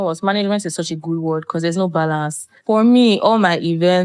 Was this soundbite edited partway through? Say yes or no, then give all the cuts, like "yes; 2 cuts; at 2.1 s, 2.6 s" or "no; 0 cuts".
yes; 1 cut; at 2.5 s